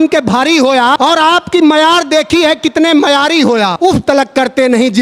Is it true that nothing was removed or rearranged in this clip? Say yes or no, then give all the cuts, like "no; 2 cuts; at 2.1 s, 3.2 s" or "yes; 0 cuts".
no; 2 cuts; at 1.0 s, 3.7 s